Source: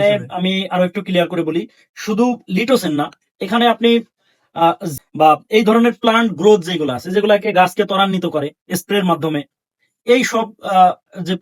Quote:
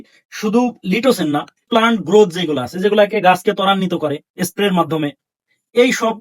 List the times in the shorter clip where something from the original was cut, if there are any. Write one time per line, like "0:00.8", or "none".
0:01.7